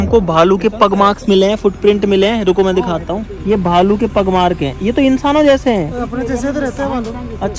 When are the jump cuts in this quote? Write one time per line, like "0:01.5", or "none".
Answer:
none

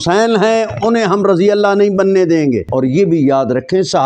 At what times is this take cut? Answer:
0:02.7

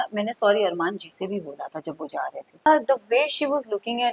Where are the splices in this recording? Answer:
0:02.7

